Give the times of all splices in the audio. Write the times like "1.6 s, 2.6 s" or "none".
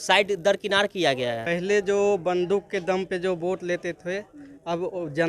1.4 s